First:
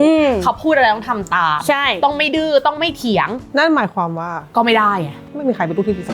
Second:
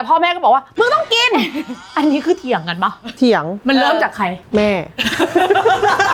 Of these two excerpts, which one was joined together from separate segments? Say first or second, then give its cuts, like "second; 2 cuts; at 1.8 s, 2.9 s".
first; 1 cut; at 3.4 s